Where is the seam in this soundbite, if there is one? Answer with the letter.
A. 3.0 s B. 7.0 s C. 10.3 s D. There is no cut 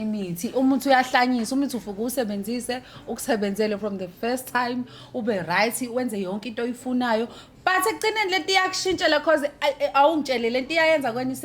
D